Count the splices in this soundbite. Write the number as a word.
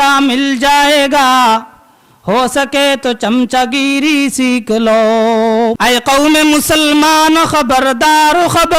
one